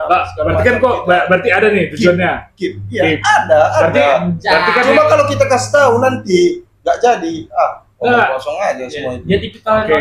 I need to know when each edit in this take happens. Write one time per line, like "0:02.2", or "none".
none